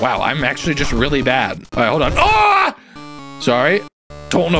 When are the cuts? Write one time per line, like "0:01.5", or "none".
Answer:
0:01.6